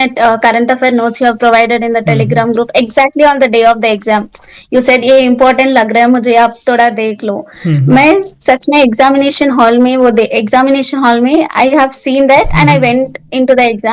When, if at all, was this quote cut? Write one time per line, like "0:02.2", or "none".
none